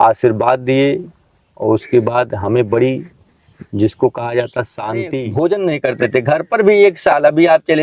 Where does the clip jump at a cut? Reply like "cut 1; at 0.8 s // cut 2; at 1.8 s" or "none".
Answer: cut 1; at 5.2 s